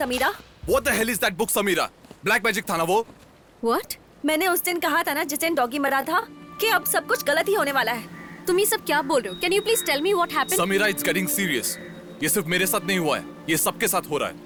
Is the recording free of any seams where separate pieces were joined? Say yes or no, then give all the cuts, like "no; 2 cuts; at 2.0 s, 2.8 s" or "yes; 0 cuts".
yes; 0 cuts